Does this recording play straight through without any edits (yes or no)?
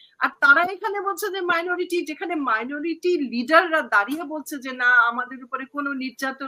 yes